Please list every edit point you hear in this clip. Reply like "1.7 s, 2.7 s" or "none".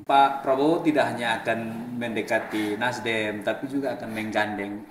none